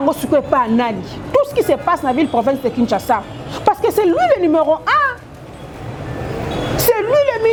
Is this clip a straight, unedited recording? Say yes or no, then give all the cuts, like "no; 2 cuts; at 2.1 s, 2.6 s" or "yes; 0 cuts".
yes; 0 cuts